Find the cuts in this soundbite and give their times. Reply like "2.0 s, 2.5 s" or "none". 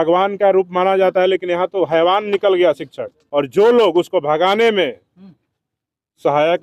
3.1 s